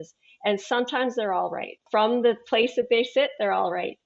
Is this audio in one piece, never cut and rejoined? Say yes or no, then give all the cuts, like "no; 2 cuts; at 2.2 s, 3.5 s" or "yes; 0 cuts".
no; 1 cut; at 1.8 s